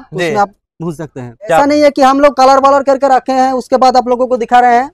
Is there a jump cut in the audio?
yes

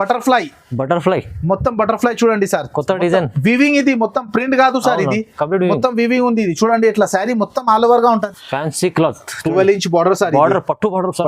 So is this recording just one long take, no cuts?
no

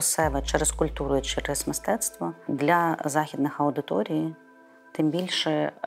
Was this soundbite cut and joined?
yes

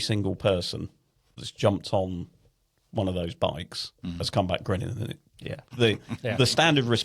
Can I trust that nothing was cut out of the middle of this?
no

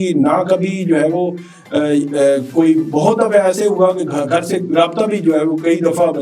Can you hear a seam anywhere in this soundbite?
no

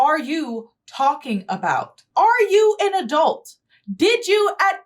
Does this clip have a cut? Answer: yes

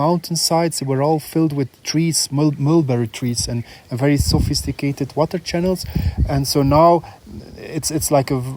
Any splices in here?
no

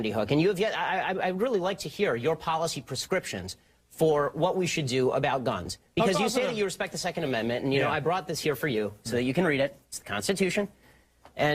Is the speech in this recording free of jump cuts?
no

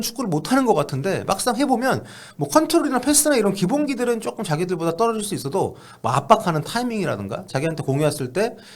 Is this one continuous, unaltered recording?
yes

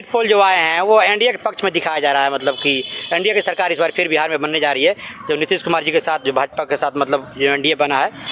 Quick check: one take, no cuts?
yes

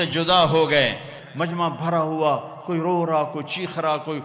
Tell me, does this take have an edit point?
yes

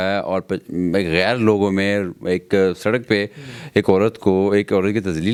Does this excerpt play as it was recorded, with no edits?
yes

